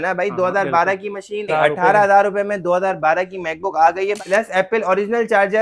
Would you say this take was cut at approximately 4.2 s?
yes; 2 cuts; at 1.5 s, 4.2 s

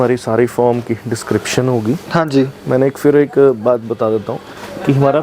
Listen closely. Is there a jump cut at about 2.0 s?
no; 0 cuts

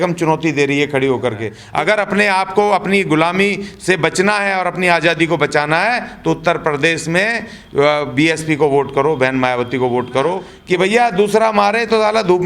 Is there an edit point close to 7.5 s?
no; 2 cuts; at 1.5 s, 10.5 s

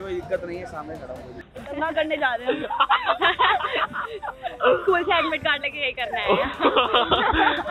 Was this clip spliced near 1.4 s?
yes; 1 cut; at 1.4 s

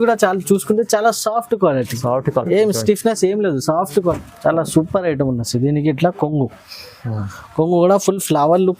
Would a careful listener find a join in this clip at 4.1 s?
yes; 1 cut; at 4.1 s

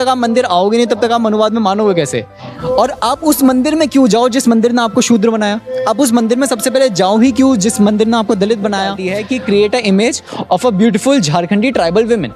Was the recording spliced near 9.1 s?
yes; 1 cut; at 9.1 s

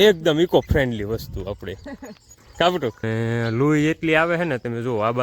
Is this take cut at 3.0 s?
yes; 1 cut; at 3.0 s

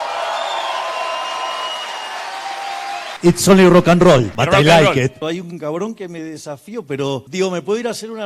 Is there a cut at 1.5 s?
no; 4 cuts; at 3.1 s, 4.3 s, 5.2 s, 7.3 s

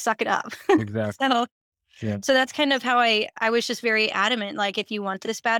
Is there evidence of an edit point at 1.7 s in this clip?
no; 0 cuts

